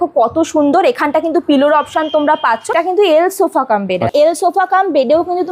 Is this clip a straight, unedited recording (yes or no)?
no